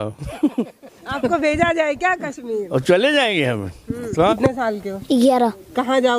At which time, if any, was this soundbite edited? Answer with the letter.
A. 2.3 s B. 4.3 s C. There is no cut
B